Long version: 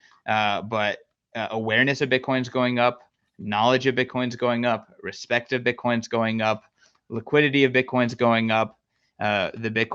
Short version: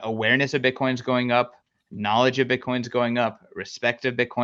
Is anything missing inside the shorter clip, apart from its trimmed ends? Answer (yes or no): no